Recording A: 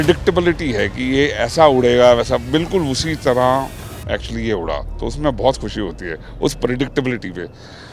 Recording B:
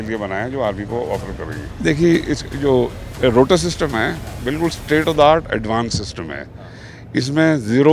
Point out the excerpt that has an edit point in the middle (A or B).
B